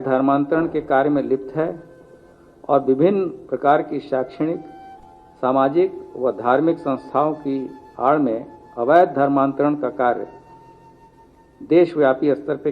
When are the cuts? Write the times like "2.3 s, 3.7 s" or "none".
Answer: none

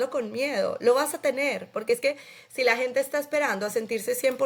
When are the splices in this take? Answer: none

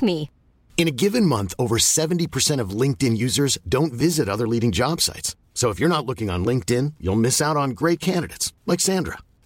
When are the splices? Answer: none

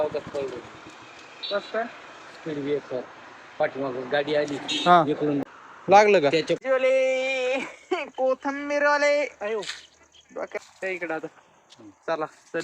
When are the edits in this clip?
5.4 s, 6.6 s

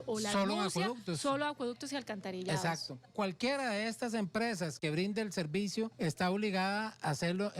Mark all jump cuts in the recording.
3.0 s, 5.9 s

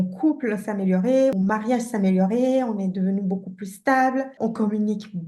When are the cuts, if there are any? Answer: 1.3 s, 4.3 s

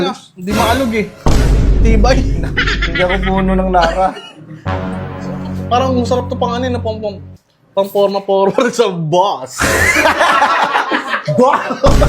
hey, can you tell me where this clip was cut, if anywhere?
none

